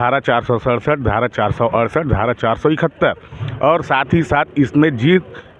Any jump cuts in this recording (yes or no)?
no